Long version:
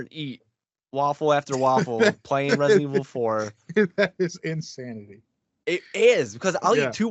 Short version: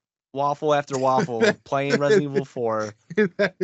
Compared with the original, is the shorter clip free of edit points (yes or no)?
yes